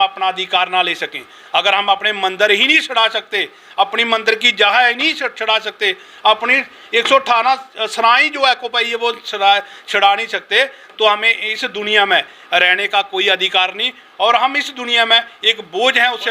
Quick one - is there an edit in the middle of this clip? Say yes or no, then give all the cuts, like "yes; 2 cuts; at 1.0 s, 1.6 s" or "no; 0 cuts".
no; 0 cuts